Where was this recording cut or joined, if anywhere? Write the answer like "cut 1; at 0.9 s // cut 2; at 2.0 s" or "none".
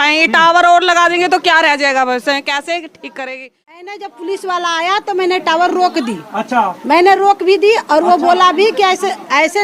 cut 1; at 3.9 s